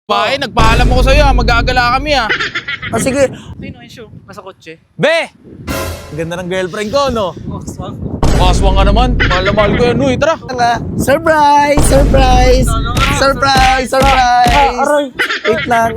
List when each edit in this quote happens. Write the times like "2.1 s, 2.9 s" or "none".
3.5 s, 10.5 s